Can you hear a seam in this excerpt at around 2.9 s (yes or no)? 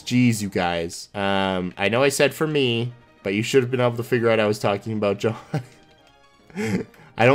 no